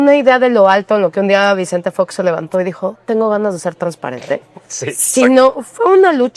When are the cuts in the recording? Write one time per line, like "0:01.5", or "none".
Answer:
none